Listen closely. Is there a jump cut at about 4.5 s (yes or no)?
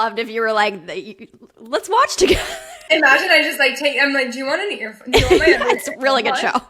no